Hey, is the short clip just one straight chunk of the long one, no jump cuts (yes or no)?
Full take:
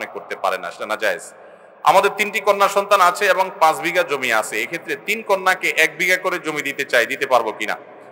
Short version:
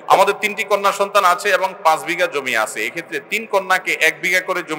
yes